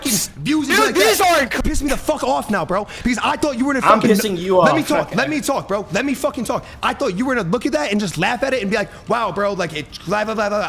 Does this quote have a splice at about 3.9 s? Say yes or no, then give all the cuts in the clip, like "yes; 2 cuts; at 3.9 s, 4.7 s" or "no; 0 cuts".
no; 1 cut; at 1.6 s